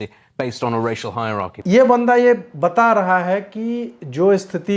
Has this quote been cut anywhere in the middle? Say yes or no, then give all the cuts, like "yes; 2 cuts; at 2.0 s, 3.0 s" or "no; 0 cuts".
no; 0 cuts